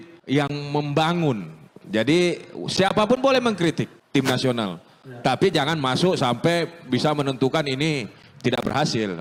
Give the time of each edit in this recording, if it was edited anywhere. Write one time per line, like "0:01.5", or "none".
none